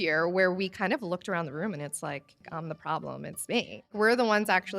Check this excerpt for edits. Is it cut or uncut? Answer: cut